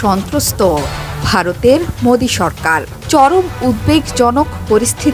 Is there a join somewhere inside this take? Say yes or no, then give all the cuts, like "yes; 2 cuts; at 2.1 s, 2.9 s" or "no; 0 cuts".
no; 0 cuts